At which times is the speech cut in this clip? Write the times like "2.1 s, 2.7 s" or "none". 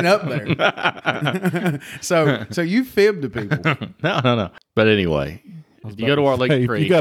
4.6 s